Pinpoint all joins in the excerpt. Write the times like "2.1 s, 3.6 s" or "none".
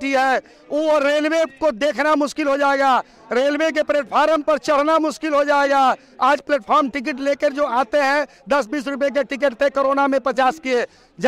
none